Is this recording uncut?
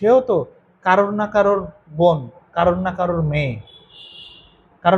yes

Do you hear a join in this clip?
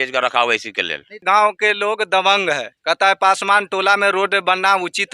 yes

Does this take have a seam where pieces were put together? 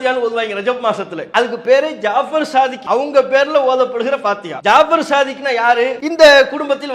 yes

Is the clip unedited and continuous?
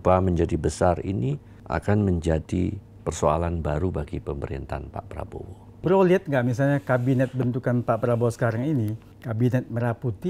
no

